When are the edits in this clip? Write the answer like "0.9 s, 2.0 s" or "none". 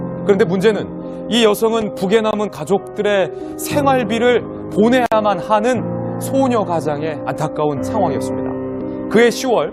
1.7 s